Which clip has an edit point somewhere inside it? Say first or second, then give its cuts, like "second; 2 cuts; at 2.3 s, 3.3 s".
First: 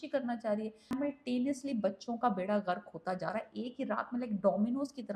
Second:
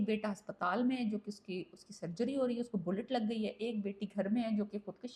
first; 1 cut; at 1.0 s